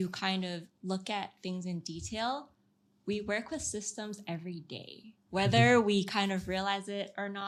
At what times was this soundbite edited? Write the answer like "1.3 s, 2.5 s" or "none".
none

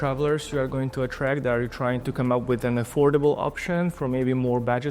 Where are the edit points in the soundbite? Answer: 2.1 s

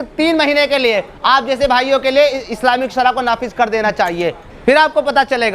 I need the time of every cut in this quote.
4.4 s

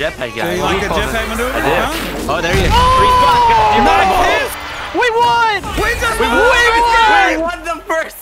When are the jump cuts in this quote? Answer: none

